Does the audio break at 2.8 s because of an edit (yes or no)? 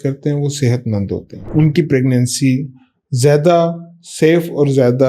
no